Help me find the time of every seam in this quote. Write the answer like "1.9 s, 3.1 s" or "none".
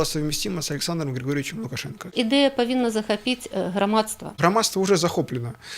2.1 s, 4.4 s